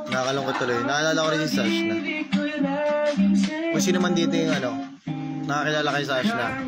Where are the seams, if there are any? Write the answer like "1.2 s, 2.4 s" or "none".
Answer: none